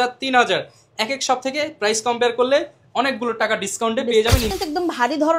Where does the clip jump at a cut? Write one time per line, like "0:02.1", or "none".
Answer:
0:04.5